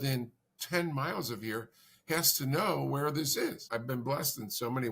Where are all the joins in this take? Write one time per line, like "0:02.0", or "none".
0:03.6